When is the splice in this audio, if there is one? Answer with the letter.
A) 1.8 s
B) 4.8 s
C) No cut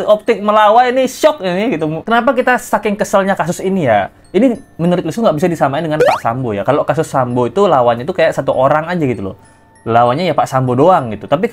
C